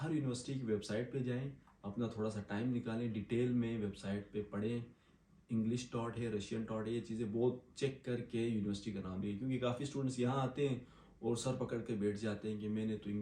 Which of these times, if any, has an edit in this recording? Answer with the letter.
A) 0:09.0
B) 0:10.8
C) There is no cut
C